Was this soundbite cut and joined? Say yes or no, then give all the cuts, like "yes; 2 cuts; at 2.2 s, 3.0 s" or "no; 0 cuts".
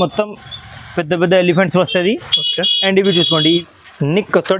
yes; 1 cut; at 3.6 s